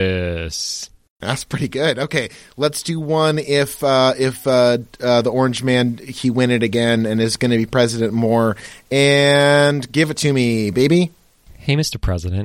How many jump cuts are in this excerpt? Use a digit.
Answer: 0